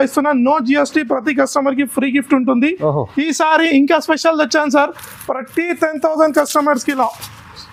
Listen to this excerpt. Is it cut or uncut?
uncut